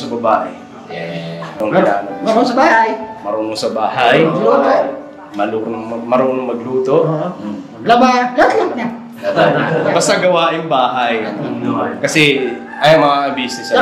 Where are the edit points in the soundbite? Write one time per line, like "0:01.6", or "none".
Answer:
0:01.4